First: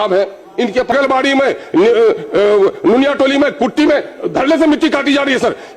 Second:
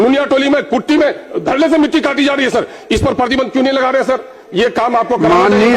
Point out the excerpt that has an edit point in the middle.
first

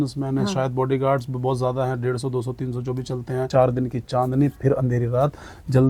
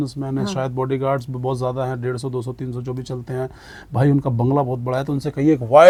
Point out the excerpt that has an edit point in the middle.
first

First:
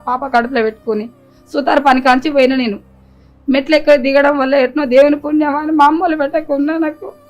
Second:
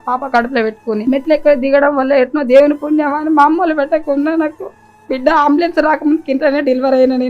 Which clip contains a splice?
second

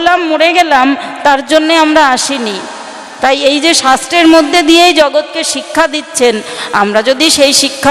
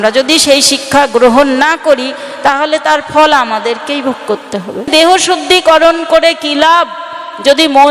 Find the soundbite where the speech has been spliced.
second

